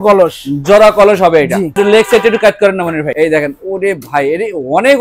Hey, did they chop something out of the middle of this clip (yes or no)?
yes